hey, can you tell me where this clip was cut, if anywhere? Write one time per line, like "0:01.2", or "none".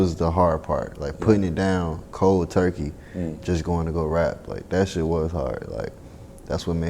none